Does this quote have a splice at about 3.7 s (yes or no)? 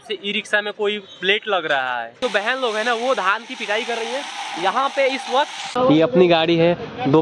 no